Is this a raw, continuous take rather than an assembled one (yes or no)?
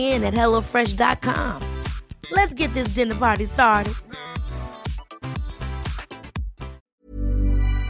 no